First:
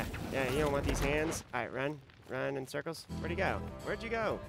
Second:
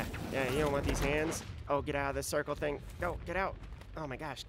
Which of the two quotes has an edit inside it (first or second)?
first